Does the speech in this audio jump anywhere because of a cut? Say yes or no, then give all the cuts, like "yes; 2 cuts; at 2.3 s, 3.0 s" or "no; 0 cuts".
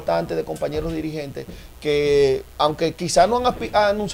no; 0 cuts